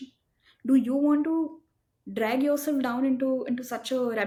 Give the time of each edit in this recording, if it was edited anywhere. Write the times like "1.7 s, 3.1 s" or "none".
none